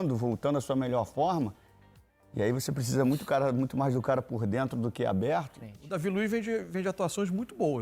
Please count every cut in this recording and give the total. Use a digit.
1